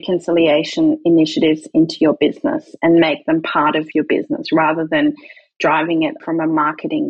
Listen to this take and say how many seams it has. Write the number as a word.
two